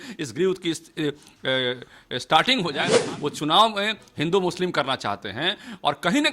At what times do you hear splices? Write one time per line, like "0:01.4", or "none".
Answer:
0:02.9